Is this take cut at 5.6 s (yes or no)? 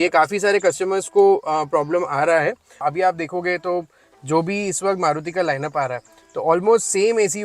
no